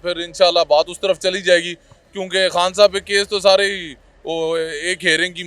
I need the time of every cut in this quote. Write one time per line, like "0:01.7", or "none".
none